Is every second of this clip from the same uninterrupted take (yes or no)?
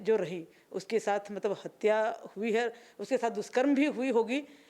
yes